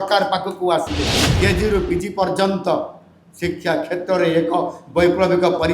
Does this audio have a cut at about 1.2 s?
yes; 1 cut; at 1.2 s

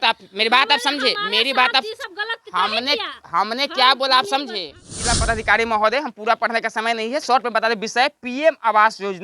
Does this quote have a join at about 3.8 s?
no; 1 cut; at 5.0 s

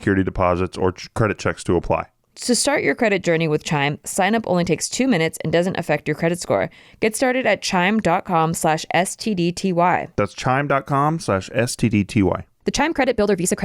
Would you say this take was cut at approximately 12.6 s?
no; 1 cut; at 2.3 s

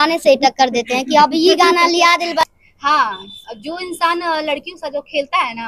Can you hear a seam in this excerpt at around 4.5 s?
no; 1 cut; at 2.4 s

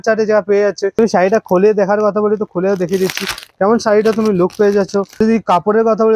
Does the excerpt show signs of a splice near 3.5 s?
no; 2 cuts; at 1.0 s, 5.1 s

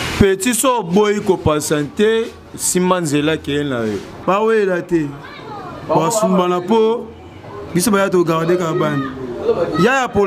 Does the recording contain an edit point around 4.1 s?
yes; 1 cut; at 4.1 s

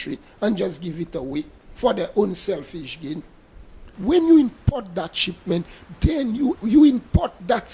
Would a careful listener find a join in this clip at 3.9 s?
yes; 2 cuts; at 3.9 s, 6.6 s

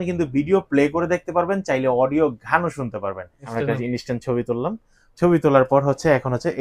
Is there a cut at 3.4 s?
yes; 1 cut; at 3.4 s

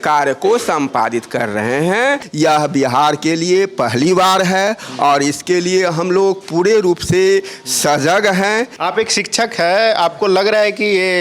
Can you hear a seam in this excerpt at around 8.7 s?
yes; 2 cuts; at 2.3 s, 8.7 s

